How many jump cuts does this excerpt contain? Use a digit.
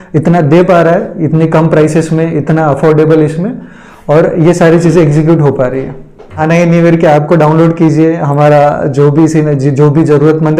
1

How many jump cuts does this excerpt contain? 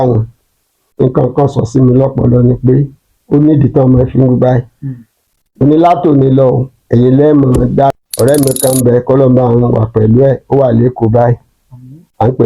1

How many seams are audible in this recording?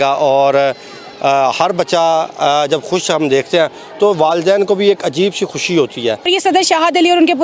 1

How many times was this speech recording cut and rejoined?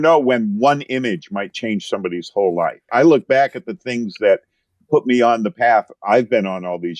1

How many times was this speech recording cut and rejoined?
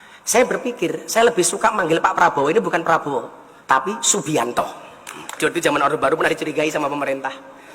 1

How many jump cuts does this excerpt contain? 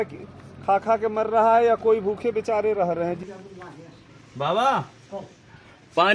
1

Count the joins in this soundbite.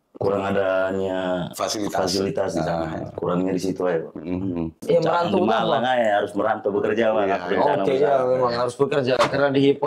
1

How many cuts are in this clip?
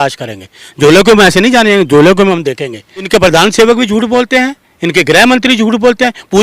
1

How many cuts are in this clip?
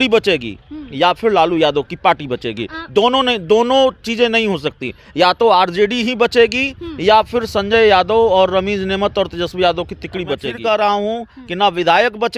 2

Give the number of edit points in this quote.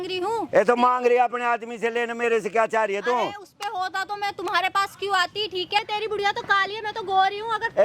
1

